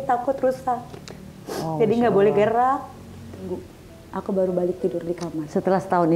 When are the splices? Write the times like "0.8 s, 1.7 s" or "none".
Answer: 3.5 s